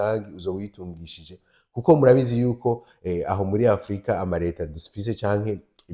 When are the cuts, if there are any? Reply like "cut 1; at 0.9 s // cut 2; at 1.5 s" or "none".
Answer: none